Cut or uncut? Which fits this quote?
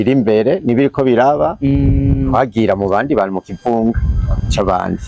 uncut